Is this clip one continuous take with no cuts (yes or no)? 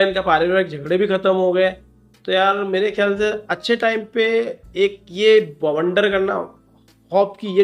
yes